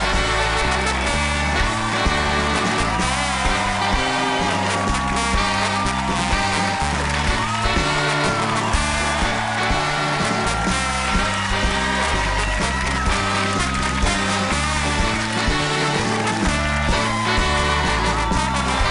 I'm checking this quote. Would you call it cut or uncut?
cut